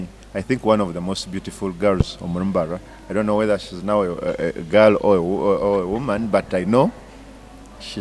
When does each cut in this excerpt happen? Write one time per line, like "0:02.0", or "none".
none